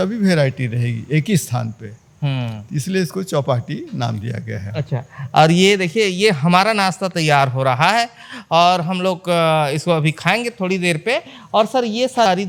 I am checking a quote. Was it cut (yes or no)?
no